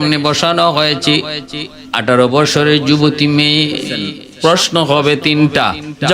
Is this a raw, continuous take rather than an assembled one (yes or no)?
no